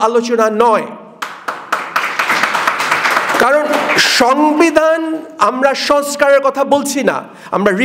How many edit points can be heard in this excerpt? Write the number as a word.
zero